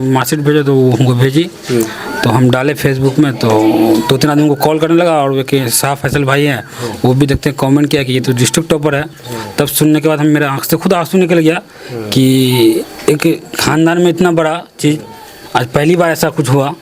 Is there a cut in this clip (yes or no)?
no